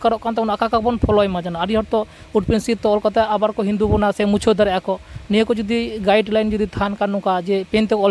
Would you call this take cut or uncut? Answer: uncut